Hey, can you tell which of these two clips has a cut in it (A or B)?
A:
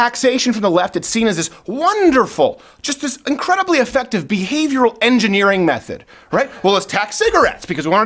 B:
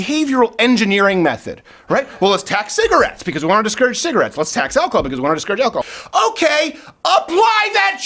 B